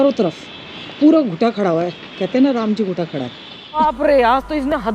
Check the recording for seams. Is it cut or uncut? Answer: cut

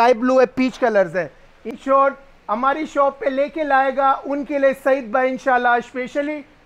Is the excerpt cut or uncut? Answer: cut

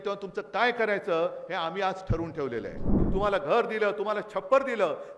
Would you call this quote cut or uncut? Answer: cut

